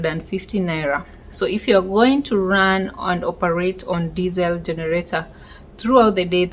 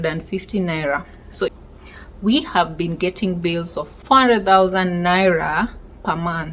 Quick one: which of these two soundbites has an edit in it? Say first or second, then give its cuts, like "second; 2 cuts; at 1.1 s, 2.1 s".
second; 2 cuts; at 1.5 s, 3.9 s